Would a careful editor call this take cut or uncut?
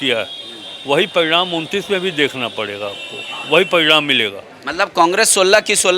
uncut